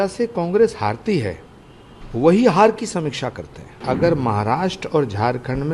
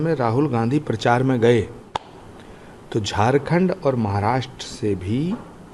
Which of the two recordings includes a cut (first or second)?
first